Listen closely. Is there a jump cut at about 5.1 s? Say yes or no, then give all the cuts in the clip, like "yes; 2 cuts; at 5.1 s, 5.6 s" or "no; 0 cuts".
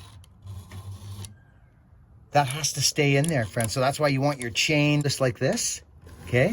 yes; 1 cut; at 5.1 s